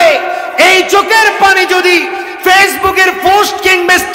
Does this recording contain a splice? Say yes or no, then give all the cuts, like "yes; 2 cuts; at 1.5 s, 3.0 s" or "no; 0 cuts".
no; 0 cuts